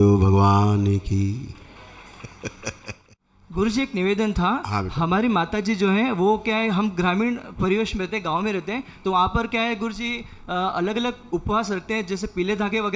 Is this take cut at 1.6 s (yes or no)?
no